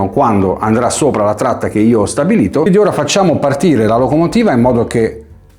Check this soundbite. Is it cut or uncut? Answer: cut